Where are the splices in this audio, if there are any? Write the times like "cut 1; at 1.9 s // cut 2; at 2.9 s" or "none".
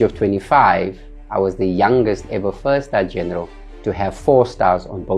none